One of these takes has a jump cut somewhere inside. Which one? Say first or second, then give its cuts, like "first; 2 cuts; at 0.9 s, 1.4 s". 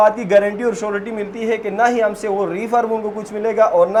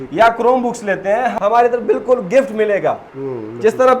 second; 2 cuts; at 1.3 s, 3.1 s